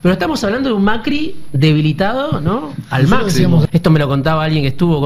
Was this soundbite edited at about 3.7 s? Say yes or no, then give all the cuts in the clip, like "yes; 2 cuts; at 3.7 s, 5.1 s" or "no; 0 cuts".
yes; 1 cut; at 3.7 s